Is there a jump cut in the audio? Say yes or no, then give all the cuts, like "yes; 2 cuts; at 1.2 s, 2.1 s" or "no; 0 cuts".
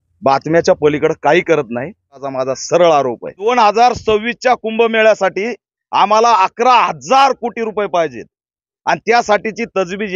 yes; 2 cuts; at 2.2 s, 3.5 s